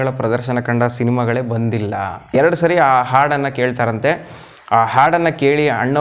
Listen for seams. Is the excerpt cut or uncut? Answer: cut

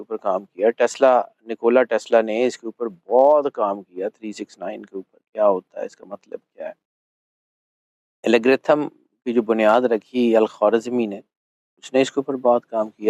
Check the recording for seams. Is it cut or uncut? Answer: uncut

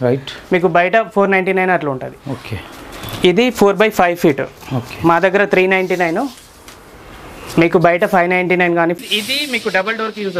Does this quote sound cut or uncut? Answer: cut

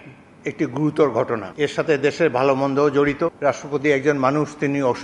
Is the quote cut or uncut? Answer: cut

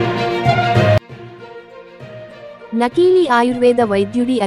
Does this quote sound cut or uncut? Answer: cut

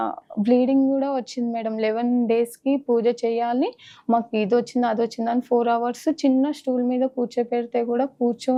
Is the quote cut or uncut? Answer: uncut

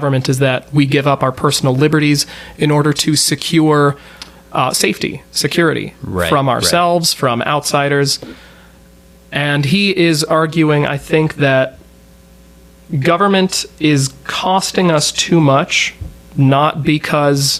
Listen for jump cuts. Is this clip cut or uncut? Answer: uncut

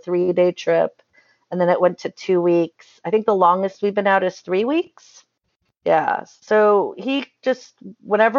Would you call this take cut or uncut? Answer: uncut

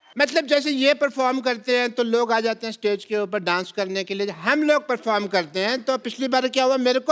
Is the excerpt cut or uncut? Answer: uncut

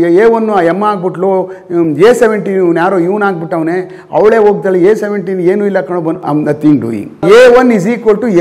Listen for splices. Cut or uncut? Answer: cut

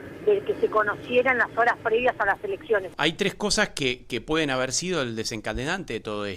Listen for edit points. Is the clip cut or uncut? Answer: cut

